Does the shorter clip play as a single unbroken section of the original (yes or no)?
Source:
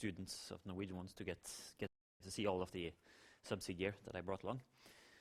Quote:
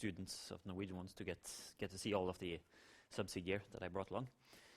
no